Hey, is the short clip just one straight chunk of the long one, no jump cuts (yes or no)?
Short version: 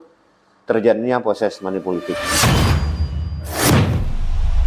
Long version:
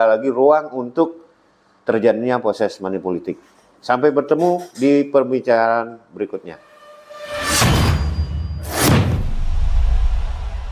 no